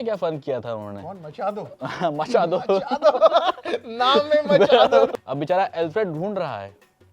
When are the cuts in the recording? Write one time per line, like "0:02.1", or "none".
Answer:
0:05.1